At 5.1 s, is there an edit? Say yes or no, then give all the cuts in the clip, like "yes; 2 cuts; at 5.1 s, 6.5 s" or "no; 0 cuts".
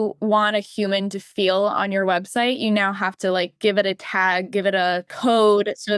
yes; 1 cut; at 5.1 s